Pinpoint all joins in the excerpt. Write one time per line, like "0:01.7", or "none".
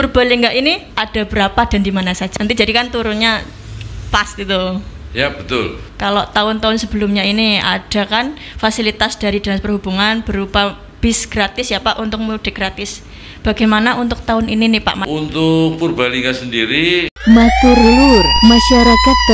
0:00.9
0:02.2
0:05.8
0:15.0
0:17.1